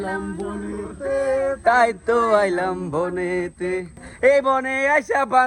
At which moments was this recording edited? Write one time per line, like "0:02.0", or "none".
none